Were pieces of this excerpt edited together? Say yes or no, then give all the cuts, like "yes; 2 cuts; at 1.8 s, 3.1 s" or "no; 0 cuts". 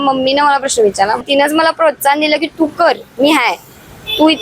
yes; 1 cut; at 1.2 s